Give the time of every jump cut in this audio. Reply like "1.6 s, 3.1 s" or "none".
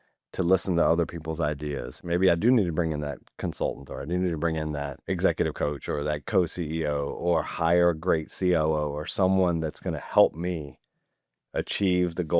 2.0 s, 5.0 s